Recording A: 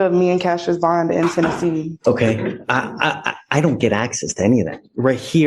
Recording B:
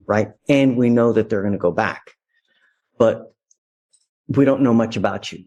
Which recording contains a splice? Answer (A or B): A